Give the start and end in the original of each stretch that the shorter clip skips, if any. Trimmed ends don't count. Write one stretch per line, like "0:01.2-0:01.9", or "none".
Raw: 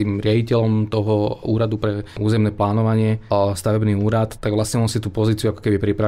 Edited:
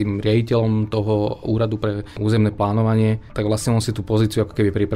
0:03.2-0:04.3